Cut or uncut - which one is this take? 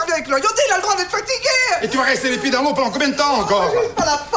uncut